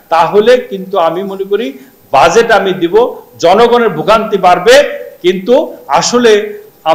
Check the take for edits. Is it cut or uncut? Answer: uncut